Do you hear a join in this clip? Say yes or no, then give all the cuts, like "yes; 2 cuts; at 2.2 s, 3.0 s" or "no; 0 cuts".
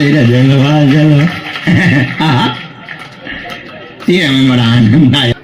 no; 0 cuts